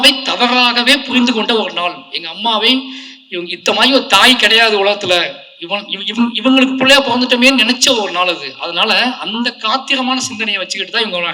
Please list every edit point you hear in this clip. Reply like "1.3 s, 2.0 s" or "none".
none